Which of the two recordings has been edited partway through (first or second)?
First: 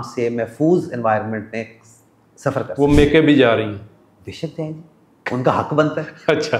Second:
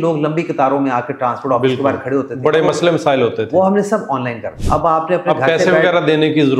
second